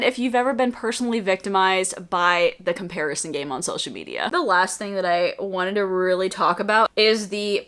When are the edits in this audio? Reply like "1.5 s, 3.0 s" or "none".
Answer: 4.3 s, 6.9 s